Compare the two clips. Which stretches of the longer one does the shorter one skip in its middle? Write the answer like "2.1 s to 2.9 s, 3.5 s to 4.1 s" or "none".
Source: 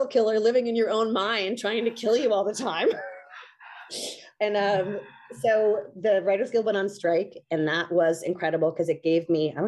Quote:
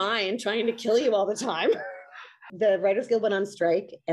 3.6 s to 5.9 s